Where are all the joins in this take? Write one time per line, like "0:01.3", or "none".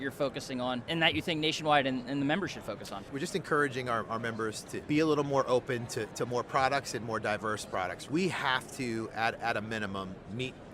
0:00.8
0:03.1
0:04.8
0:08.0